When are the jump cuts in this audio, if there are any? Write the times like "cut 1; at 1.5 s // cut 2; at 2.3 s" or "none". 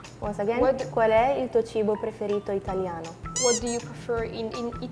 none

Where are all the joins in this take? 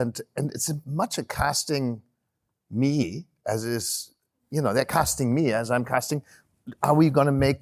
none

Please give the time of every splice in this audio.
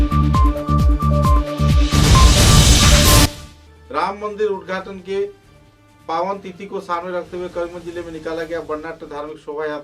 cut 1; at 3.3 s

